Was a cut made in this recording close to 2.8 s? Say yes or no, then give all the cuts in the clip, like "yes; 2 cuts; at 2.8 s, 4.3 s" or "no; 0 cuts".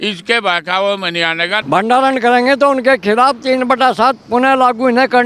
no; 1 cut; at 1.5 s